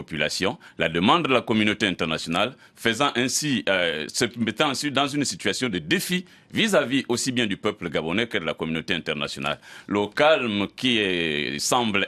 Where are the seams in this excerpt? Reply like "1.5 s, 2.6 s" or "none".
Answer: none